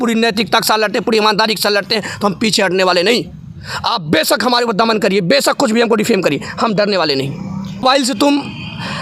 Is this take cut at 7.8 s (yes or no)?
yes